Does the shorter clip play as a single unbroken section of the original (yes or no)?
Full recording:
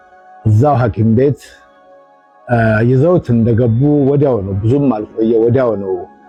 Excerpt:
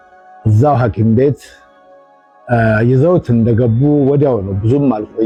yes